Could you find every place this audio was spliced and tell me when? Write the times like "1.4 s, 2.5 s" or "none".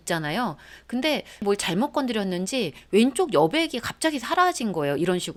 none